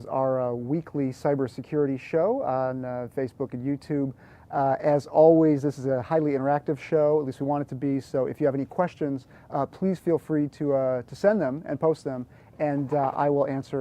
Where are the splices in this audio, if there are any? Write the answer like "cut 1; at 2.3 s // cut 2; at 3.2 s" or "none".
cut 1; at 5.8 s